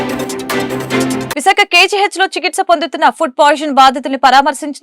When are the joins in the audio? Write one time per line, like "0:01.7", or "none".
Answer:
0:01.3